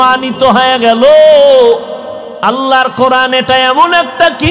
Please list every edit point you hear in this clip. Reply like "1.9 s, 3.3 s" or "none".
2.3 s